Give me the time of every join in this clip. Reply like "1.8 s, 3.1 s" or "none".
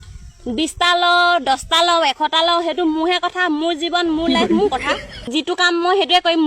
5.3 s